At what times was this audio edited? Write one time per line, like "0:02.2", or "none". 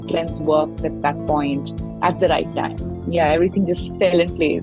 none

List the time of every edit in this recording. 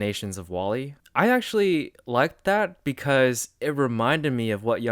0:01.0

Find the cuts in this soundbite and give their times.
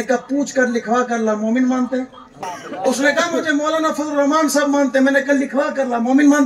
0:02.5

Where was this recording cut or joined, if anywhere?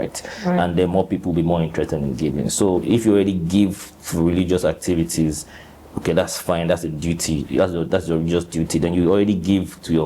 0:02.8

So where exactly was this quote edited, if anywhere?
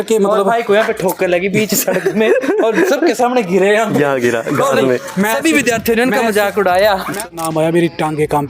0:07.3

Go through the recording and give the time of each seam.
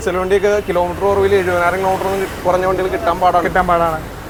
none

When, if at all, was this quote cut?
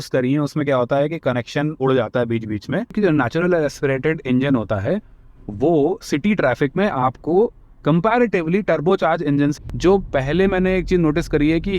0:02.9
0:09.5

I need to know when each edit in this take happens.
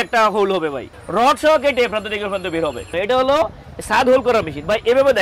0:00.9
0:02.9

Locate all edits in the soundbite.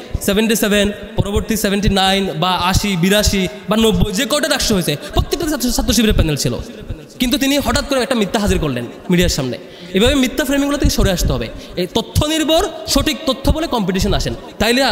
none

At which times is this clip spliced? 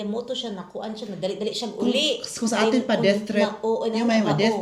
none

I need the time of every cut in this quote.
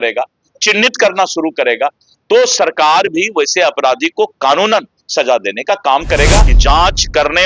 0:06.5

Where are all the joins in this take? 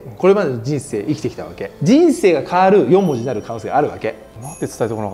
0:01.6
0:04.2

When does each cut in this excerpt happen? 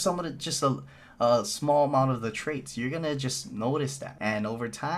0:04.1

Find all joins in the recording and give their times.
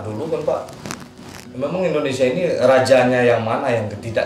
none

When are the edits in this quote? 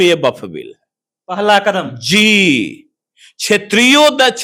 none

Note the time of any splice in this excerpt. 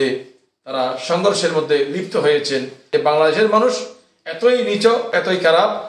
0:02.9
0:05.1

